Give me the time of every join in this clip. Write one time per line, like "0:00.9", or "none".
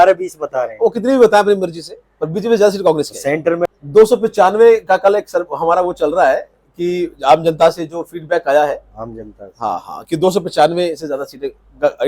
0:03.7

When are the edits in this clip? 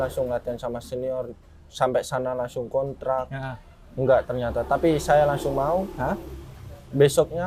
none

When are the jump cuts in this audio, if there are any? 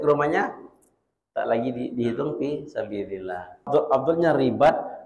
0:03.7

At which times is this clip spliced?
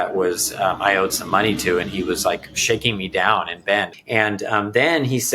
0:04.0

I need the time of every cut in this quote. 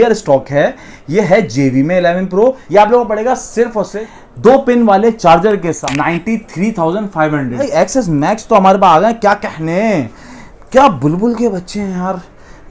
0:02.6
0:04.1
0:05.8
0:07.6

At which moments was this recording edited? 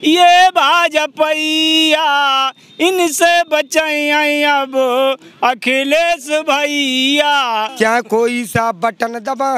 0:07.7

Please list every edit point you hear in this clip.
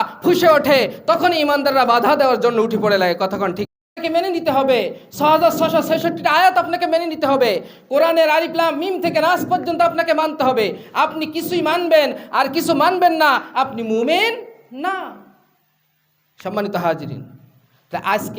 0:04.0

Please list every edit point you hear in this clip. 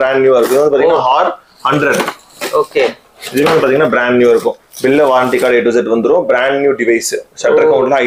none

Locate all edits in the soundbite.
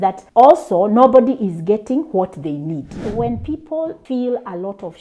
0:03.0

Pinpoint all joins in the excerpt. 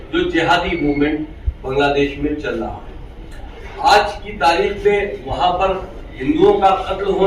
none

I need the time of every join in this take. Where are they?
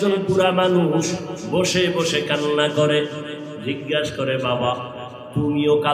none

